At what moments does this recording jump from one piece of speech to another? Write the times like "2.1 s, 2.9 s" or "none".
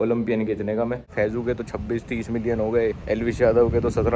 1.1 s

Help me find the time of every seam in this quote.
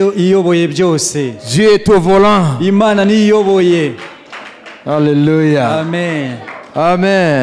none

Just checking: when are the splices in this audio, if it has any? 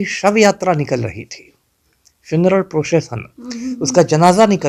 none

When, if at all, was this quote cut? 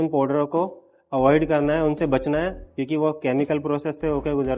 none

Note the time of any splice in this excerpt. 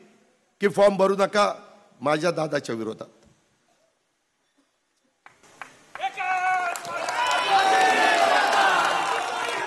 none

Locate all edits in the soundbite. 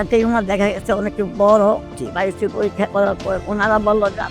1.8 s, 3.4 s

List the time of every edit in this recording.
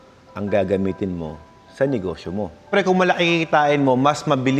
2.7 s

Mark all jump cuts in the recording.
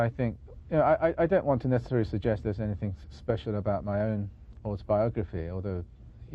3.4 s

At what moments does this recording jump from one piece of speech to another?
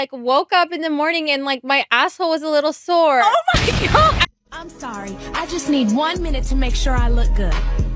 4.3 s

